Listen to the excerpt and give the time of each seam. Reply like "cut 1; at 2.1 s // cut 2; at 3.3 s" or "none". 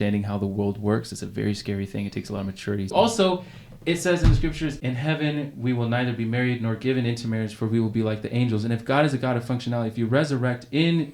cut 1; at 2.9 s // cut 2; at 4.8 s